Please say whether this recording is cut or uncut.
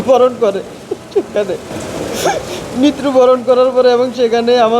cut